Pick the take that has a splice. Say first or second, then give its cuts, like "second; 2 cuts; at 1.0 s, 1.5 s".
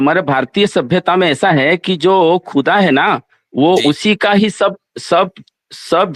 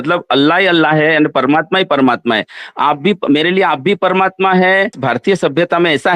second; 1 cut; at 5.0 s